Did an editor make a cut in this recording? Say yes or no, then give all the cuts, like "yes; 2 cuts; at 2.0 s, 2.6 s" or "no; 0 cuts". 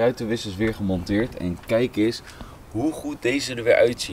no; 0 cuts